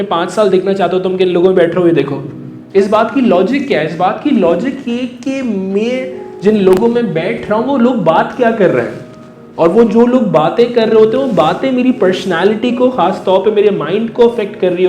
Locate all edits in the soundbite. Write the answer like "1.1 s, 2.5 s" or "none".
none